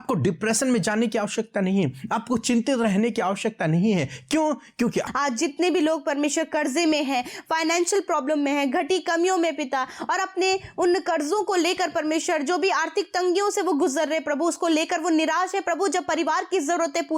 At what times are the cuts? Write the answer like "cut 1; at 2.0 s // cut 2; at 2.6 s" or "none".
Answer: cut 1; at 5.1 s